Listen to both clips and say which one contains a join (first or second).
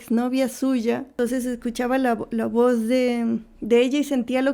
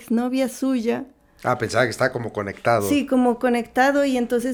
first